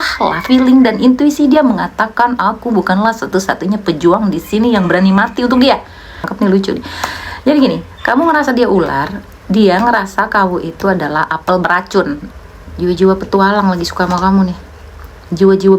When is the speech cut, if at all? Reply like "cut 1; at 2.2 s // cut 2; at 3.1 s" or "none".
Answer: cut 1; at 6.3 s // cut 2; at 12.2 s